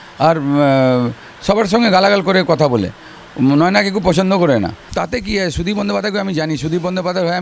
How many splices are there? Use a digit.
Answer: 1